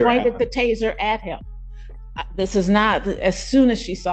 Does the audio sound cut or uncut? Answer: uncut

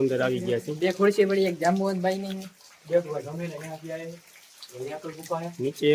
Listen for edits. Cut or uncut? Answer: uncut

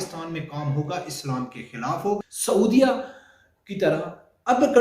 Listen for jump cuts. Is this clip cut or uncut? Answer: cut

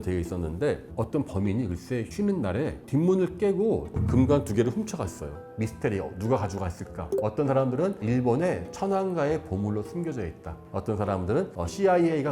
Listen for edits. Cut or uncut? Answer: cut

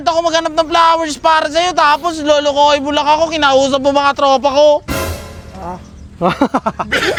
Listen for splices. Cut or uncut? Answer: uncut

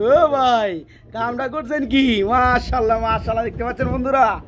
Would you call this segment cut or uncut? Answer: uncut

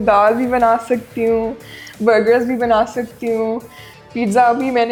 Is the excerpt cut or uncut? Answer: uncut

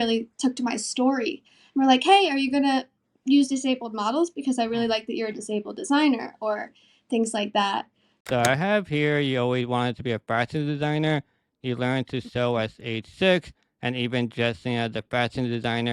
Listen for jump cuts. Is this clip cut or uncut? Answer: cut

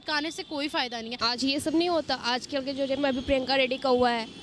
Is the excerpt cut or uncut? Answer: cut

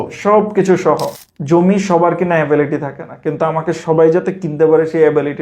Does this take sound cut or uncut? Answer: cut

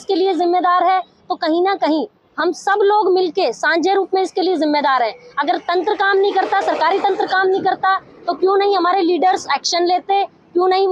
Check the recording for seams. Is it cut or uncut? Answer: uncut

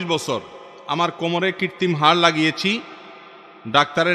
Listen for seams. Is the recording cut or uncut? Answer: uncut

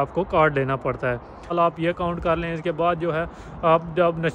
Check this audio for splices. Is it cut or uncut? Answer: cut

